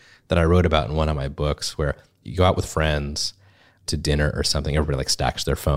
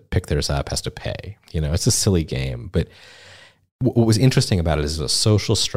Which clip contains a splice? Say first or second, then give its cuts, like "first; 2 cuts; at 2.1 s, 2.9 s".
first; 2 cuts; at 2.1 s, 3.8 s